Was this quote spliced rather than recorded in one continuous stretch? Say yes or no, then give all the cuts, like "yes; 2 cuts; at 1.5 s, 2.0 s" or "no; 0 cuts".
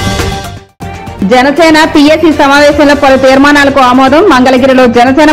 yes; 1 cut; at 1.2 s